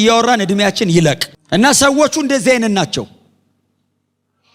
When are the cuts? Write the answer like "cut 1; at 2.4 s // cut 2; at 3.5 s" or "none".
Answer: none